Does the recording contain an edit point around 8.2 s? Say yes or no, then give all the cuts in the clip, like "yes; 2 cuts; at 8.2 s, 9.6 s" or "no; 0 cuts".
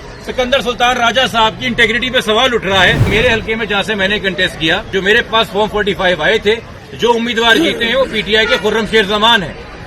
no; 3 cuts; at 3.0 s, 4.9 s, 6.8 s